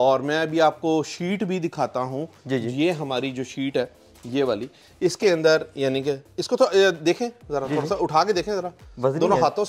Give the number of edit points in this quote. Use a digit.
0